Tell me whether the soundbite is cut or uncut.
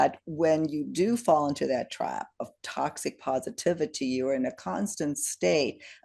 uncut